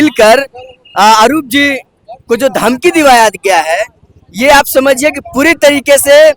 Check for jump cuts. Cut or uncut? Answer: uncut